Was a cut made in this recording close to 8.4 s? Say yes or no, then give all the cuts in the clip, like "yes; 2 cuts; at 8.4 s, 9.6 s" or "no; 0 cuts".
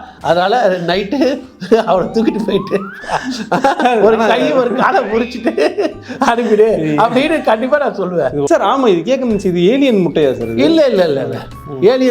yes; 1 cut; at 8.4 s